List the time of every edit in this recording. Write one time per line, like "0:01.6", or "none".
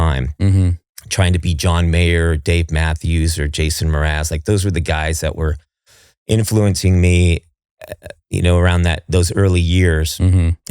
none